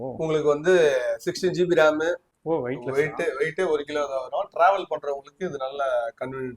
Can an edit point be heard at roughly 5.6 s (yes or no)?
no